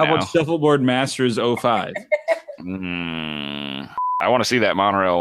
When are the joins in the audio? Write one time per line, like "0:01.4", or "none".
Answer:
0:04.0